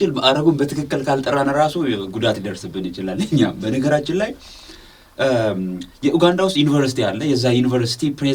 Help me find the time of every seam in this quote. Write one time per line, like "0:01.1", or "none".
none